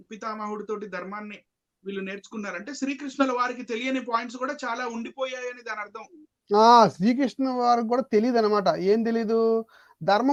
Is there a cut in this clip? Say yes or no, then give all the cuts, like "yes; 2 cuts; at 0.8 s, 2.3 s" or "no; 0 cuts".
no; 0 cuts